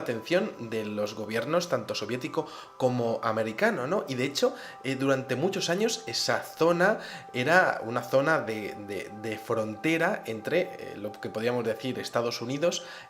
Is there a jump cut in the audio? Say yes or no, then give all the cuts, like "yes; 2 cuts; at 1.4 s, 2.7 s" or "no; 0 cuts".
yes; 1 cut; at 5.2 s